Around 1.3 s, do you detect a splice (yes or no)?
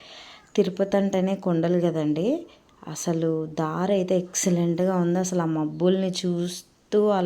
no